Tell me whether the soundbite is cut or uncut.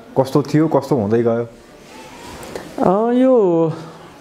uncut